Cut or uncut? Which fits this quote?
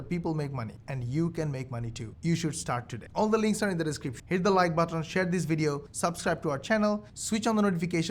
uncut